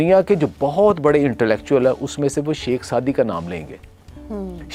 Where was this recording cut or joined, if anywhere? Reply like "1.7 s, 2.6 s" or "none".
none